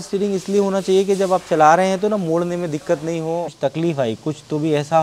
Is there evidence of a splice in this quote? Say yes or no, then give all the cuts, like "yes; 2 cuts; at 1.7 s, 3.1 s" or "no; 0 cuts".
yes; 1 cut; at 3.5 s